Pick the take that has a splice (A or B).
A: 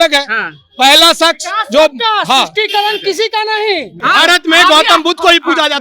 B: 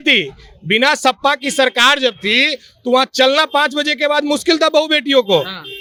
A